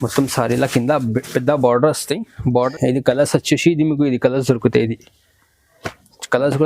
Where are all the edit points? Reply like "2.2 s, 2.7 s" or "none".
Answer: 2.7 s